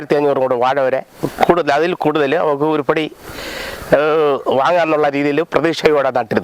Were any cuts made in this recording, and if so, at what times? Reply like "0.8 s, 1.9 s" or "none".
none